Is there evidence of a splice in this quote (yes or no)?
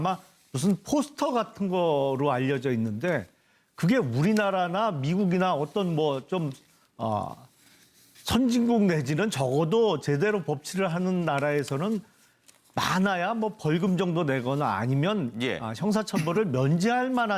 yes